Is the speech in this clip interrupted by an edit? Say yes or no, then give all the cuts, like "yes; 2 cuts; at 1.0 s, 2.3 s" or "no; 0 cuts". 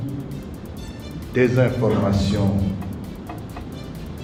no; 0 cuts